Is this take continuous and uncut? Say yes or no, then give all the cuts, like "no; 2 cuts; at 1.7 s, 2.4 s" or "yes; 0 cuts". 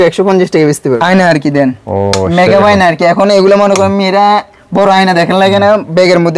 no; 1 cut; at 1.0 s